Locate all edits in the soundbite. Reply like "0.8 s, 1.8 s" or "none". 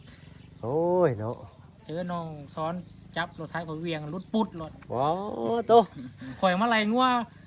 none